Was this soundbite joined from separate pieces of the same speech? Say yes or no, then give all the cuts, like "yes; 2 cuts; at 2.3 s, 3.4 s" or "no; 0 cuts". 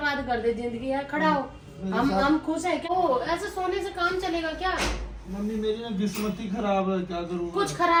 no; 0 cuts